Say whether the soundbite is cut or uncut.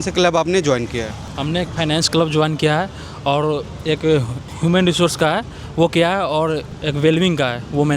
uncut